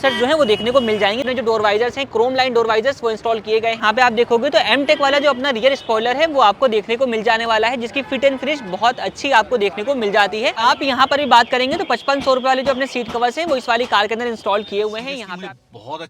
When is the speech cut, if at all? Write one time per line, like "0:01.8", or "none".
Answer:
0:01.2
0:03.8
0:10.6
0:15.2